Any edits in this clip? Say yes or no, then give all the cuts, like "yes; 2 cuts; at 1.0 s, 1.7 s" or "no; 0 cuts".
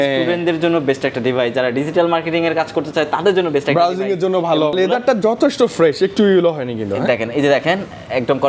yes; 1 cut; at 4.8 s